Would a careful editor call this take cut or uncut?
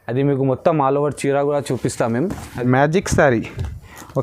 cut